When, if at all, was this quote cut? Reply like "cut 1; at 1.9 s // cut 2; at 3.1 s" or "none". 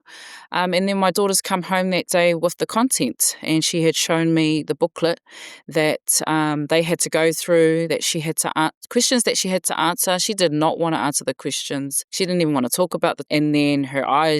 cut 1; at 12.0 s // cut 2; at 13.2 s